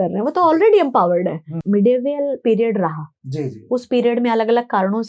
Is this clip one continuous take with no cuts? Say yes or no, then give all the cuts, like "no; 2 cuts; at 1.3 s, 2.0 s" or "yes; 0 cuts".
no; 1 cut; at 1.6 s